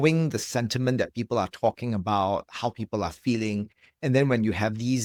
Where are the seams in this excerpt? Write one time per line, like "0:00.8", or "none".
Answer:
none